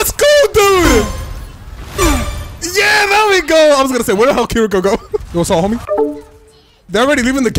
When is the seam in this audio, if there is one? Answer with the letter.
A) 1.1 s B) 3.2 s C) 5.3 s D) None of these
C